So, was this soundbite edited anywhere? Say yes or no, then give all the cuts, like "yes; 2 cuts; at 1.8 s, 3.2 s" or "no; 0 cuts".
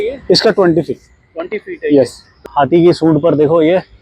yes; 1 cut; at 2.5 s